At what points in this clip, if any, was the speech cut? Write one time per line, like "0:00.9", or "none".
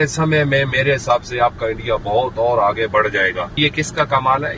0:03.5